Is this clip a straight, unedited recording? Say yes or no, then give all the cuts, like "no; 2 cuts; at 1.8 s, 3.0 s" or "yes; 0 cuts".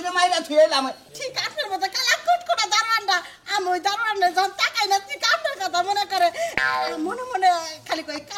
no; 1 cut; at 1.0 s